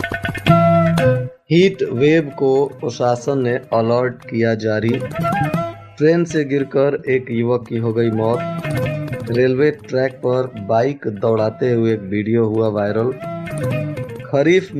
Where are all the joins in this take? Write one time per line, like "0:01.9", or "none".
0:01.3